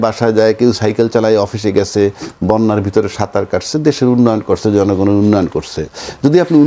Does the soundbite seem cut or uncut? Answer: uncut